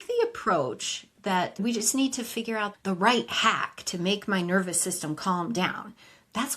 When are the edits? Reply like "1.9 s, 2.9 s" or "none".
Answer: 1.6 s, 2.7 s